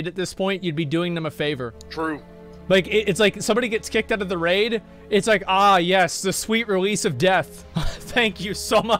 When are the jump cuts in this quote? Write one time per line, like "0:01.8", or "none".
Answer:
0:01.8
0:07.6